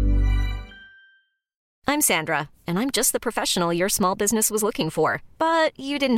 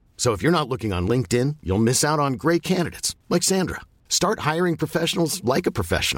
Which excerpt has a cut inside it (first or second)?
first